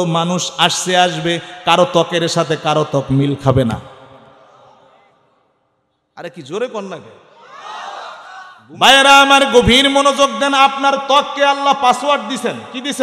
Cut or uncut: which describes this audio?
cut